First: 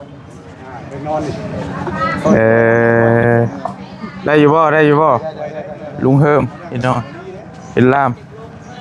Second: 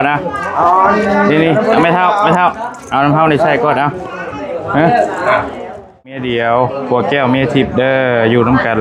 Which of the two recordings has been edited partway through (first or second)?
second